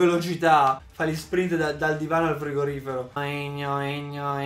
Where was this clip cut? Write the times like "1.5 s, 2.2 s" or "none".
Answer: 3.1 s